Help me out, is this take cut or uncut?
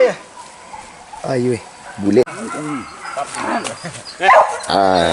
cut